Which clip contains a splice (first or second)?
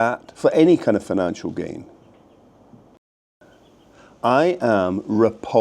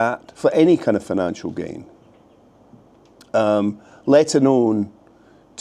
first